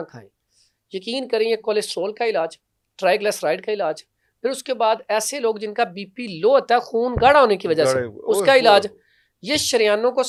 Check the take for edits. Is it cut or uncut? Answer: uncut